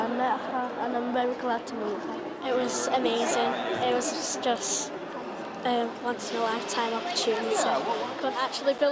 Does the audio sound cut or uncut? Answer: uncut